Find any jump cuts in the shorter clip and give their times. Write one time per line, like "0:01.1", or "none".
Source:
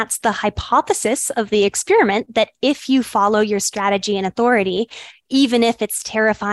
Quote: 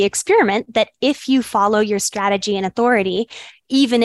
none